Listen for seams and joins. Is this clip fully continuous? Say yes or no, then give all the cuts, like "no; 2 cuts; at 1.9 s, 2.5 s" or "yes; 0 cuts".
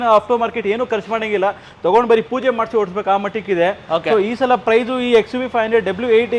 yes; 0 cuts